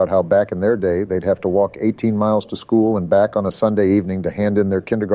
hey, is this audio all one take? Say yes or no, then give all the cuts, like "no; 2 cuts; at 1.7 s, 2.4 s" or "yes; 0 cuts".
yes; 0 cuts